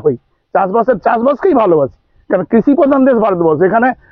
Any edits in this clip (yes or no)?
no